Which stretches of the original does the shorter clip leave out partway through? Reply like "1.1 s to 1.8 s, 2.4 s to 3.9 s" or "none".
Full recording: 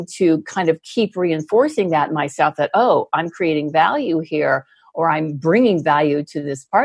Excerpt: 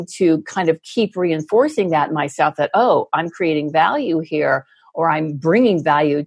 none